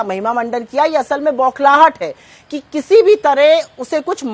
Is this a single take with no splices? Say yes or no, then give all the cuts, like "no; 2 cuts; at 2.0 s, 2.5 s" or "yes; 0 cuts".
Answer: yes; 0 cuts